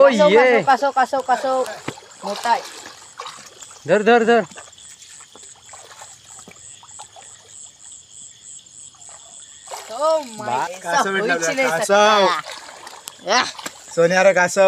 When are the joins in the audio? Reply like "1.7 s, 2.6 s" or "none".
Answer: 10.6 s